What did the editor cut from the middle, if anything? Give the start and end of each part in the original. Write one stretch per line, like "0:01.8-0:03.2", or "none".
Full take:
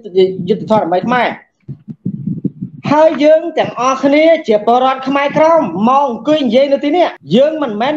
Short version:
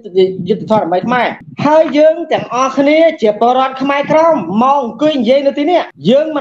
0:01.4-0:02.7